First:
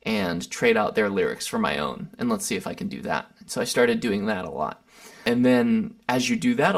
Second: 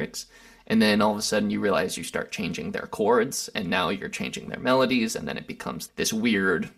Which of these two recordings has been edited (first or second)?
first